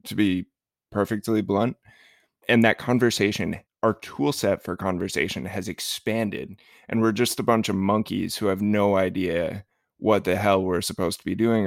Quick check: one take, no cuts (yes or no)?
no